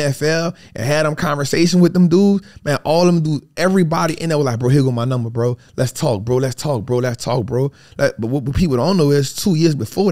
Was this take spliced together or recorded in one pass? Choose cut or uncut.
uncut